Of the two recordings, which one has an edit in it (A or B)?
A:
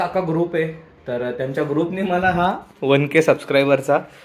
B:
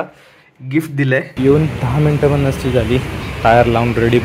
B